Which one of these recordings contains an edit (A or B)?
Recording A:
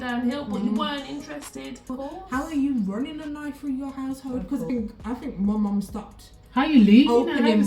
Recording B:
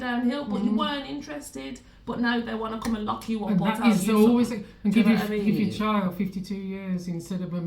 A